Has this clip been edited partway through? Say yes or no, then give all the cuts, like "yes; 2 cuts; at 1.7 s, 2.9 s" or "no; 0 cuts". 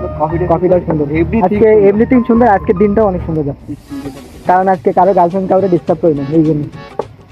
no; 0 cuts